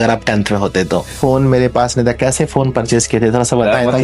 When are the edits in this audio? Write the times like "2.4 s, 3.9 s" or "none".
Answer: 1.1 s